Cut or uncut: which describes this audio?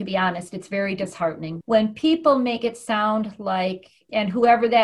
cut